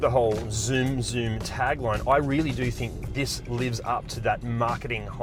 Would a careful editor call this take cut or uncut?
uncut